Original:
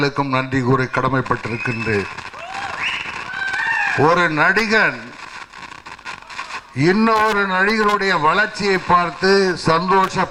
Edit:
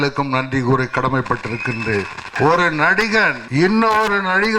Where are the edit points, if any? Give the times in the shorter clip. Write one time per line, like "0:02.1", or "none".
0:02.3
0:03.4